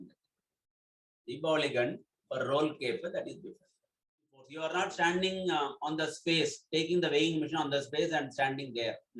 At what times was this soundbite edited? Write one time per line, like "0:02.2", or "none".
0:04.4